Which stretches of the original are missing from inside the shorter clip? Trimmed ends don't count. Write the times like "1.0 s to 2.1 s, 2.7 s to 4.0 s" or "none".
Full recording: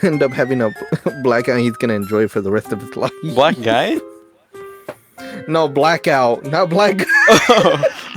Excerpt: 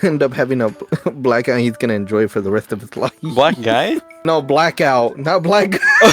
4.1 s to 5.4 s